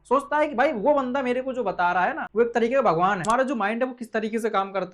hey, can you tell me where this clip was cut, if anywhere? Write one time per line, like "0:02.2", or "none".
0:02.2
0:03.2